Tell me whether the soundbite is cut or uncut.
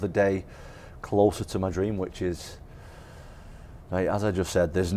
uncut